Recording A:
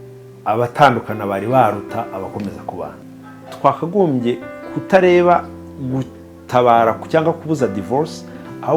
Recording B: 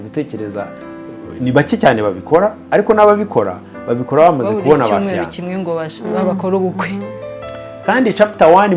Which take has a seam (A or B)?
A